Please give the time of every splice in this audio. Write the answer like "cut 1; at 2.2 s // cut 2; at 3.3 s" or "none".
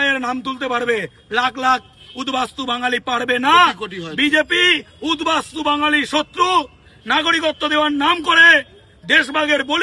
none